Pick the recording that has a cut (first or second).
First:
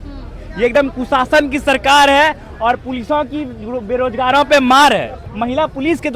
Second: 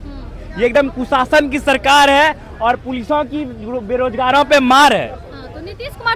first